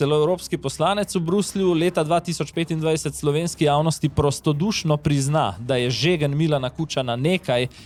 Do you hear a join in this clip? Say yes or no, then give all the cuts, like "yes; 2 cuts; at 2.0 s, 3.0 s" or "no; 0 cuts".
no; 0 cuts